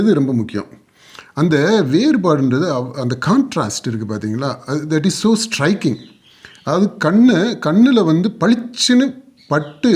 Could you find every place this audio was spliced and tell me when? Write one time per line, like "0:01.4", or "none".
none